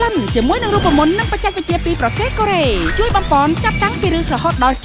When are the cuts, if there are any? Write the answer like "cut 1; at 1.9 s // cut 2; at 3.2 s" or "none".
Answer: none